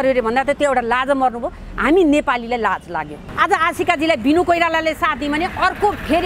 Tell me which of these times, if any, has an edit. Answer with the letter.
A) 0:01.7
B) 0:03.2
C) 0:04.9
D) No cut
B